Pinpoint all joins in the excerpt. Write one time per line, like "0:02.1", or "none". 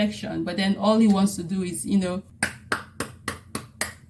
0:02.3